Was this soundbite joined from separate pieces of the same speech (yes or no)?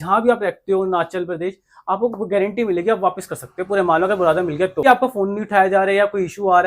yes